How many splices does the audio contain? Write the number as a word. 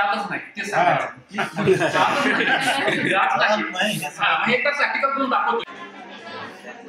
one